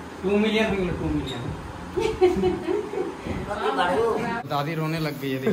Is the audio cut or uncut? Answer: cut